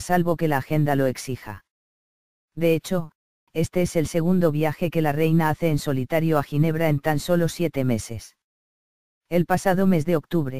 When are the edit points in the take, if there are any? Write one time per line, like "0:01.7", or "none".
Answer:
0:05.8